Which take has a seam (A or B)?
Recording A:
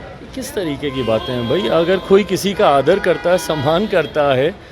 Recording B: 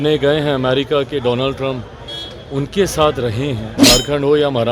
B